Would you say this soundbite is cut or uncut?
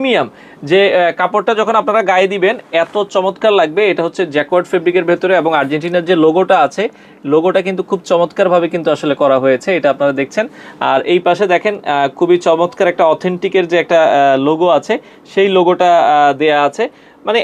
uncut